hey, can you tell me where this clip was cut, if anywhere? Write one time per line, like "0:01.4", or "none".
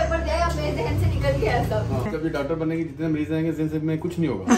none